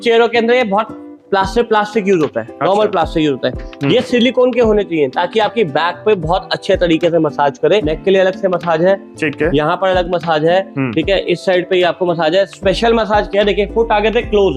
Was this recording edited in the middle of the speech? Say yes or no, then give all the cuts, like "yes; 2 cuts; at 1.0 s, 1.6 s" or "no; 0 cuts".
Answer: yes; 1 cut; at 7.9 s